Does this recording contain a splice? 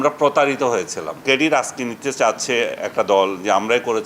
yes; 1 cut; at 1.0 s

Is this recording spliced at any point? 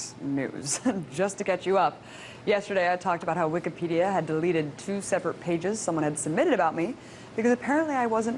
no; 0 cuts

